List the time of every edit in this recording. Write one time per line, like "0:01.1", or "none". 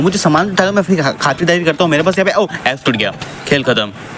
none